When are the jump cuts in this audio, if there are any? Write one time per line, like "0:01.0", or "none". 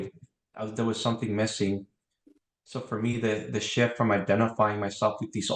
none